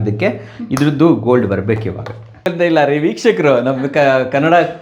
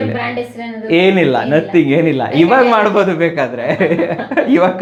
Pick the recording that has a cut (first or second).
first